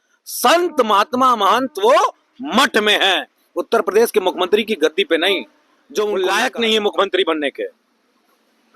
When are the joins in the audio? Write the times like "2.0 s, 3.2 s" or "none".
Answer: 6.2 s